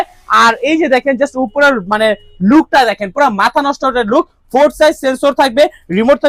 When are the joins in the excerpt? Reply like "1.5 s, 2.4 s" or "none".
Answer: none